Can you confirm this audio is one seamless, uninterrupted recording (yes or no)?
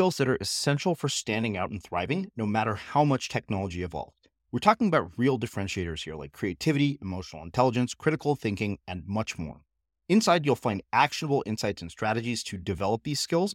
yes